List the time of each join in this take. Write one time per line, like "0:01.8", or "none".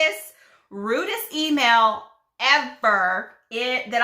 none